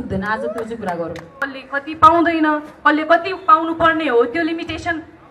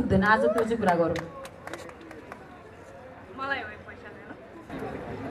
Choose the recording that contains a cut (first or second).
first